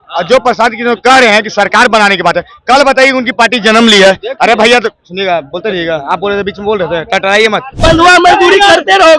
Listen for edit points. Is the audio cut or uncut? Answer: cut